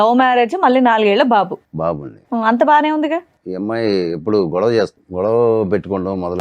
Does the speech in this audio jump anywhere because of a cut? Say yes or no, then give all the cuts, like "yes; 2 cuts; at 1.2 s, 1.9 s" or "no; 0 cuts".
yes; 2 cuts; at 3.4 s, 5.0 s